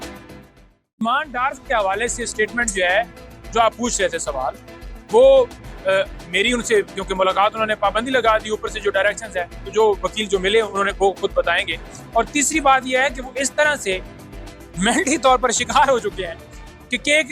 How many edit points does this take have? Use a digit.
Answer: 1